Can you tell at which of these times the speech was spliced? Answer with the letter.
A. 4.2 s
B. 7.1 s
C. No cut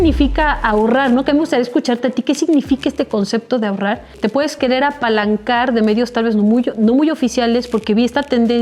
A